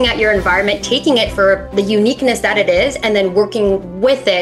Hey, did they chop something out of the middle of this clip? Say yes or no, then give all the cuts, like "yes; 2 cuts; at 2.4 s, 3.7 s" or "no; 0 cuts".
yes; 1 cut; at 1.6 s